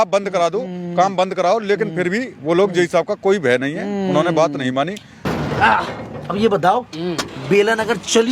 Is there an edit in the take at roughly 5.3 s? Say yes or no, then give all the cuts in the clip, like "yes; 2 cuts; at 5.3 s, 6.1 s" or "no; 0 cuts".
yes; 1 cut; at 5.3 s